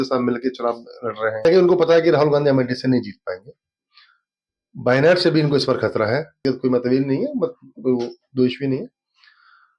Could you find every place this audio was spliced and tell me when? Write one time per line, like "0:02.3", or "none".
0:01.4
0:06.4

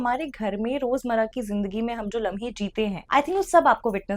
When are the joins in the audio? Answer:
0:03.0

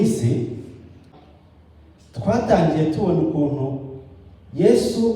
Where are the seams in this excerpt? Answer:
0:01.2

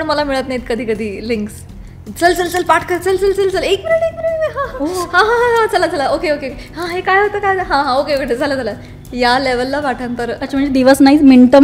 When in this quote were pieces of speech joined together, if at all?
none

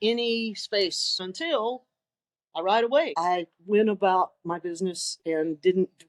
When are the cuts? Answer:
0:01.2
0:03.1

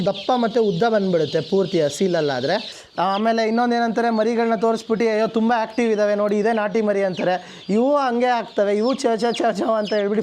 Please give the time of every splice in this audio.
0:02.7

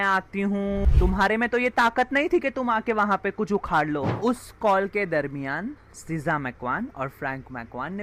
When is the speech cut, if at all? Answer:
0:00.9
0:04.1

